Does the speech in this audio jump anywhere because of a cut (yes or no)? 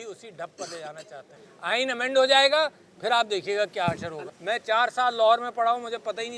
yes